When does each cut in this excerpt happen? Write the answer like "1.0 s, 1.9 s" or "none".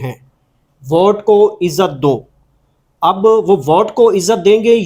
none

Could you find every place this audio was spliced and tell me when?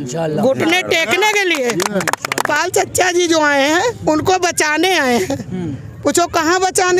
2.5 s

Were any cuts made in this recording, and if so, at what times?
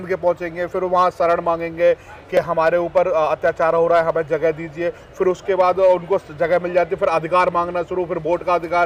none

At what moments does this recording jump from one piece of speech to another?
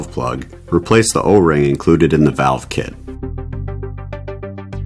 3.0 s

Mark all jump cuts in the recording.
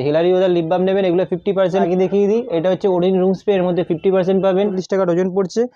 1.8 s, 4.8 s

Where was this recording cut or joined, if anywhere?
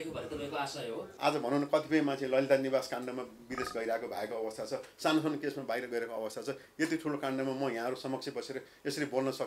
1.0 s

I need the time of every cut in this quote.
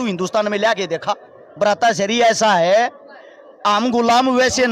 1.4 s

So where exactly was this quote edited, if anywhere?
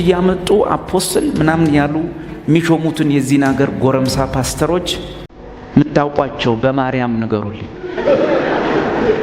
none

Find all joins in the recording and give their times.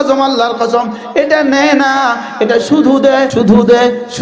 3.3 s

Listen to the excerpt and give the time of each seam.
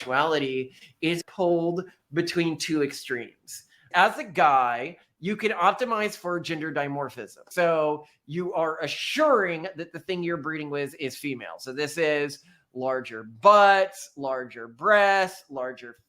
1.2 s, 3.9 s, 7.5 s

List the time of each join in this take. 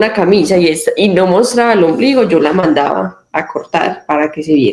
none

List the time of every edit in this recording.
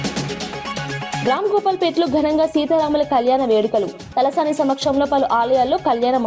1.2 s

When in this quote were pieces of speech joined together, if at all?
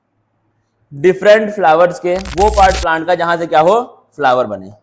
2.3 s

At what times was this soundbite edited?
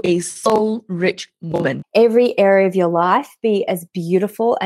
1.8 s

